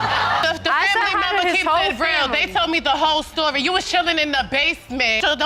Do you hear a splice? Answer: no; 0 cuts

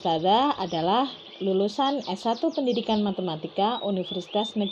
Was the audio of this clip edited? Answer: no; 0 cuts

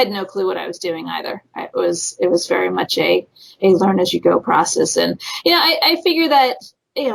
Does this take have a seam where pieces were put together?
no; 0 cuts

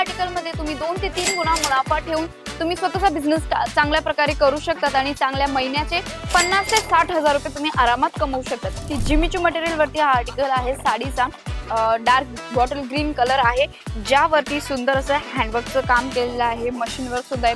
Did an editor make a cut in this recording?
yes; 1 cut; at 8.9 s

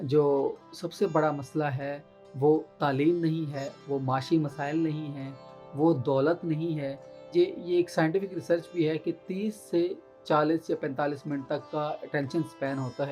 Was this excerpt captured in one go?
no; 1 cut; at 7.2 s

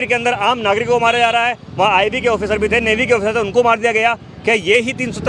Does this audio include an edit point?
no; 0 cuts

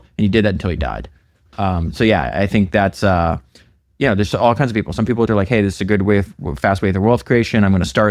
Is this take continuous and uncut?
no; 1 cut; at 5.3 s

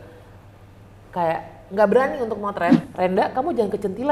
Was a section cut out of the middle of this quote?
yes; 1 cut; at 2.8 s

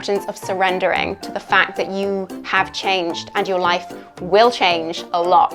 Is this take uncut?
yes; 0 cuts

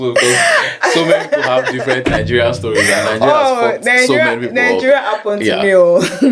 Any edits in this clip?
no; 0 cuts

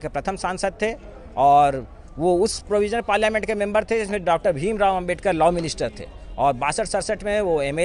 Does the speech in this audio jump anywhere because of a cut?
no; 0 cuts

